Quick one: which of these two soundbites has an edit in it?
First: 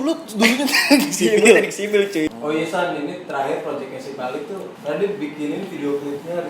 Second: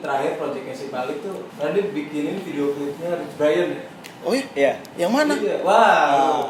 first; 1 cut; at 2.3 s

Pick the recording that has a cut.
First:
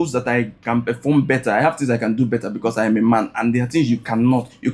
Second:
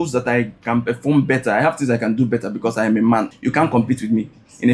second; 1 cut; at 3.3 s

